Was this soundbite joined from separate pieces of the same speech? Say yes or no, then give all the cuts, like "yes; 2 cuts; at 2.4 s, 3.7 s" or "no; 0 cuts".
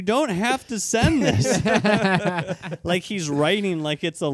no; 0 cuts